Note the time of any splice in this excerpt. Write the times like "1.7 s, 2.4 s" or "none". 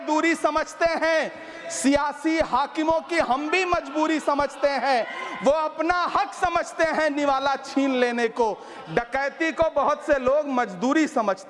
none

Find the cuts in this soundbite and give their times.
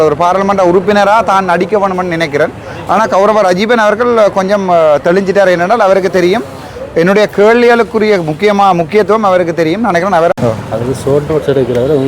10.3 s

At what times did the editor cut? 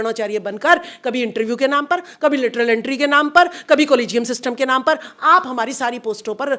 none

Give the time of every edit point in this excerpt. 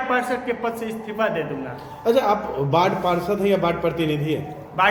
none

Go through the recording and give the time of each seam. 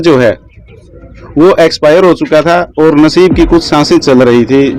none

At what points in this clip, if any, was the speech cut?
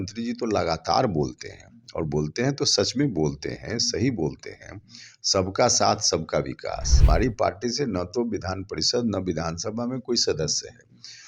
6.9 s

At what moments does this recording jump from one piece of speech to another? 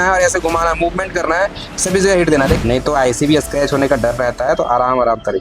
2.6 s

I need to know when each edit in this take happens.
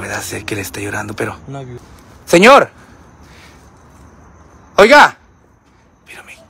1.7 s

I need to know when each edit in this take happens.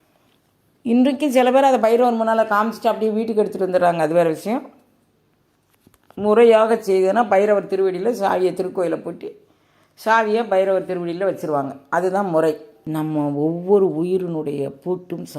12.7 s

